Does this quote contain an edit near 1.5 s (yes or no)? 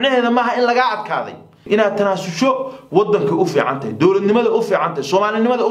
yes